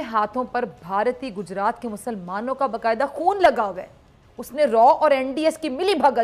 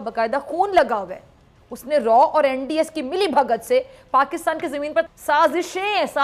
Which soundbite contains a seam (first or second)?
second